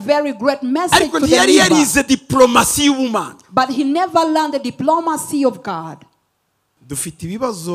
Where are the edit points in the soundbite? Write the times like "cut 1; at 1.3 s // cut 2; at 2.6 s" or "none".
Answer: cut 1; at 6.7 s